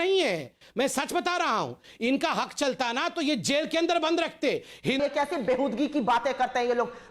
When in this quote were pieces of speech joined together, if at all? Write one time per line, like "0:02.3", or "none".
0:05.0

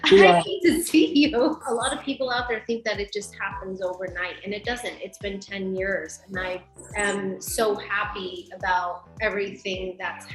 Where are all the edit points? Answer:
0:01.6
0:06.8

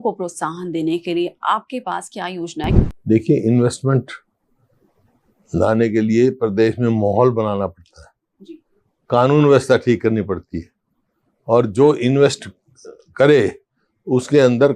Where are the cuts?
0:02.7

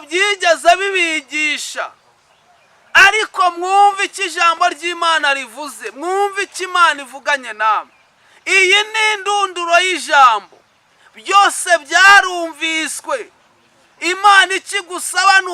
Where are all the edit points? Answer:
none

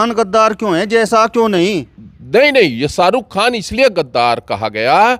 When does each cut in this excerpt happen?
none

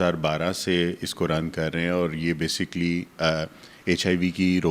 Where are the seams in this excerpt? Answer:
none

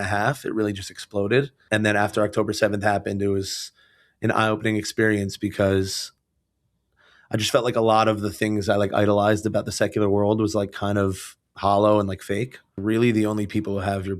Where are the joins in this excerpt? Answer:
0:01.6
0:12.8

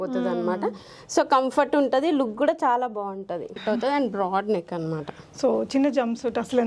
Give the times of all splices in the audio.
0:03.5

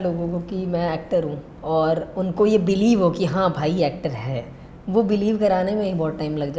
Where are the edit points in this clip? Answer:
0:01.5

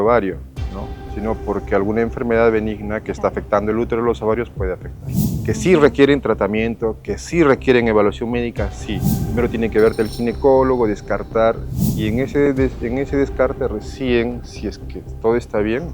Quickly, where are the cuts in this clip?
0:05.3
0:09.2
0:11.7

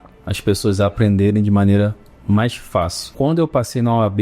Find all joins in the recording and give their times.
0:03.1

